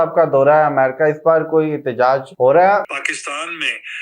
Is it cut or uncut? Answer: cut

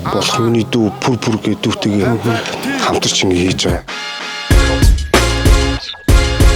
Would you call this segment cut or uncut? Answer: cut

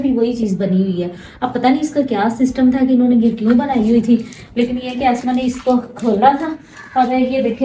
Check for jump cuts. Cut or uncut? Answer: uncut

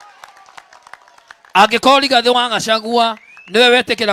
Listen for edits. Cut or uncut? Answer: uncut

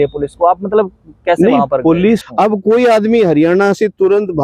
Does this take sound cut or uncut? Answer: cut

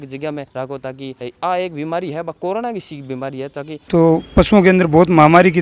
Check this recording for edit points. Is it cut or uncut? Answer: cut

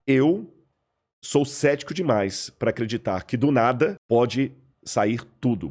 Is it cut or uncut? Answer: cut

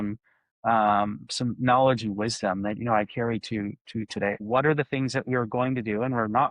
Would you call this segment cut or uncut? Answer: cut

